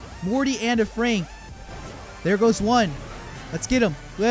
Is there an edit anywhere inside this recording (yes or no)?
no